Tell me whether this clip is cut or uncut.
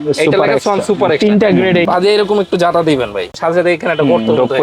cut